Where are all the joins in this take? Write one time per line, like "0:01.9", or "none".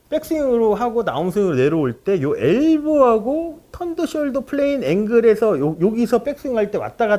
0:05.8